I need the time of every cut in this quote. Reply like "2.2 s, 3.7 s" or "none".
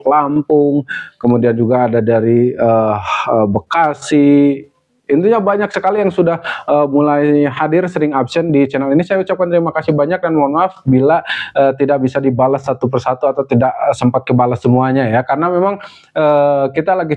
none